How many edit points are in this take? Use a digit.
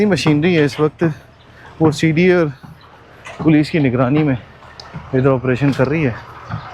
0